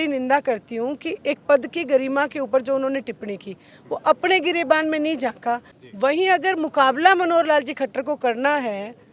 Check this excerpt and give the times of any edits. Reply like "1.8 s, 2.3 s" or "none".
5.8 s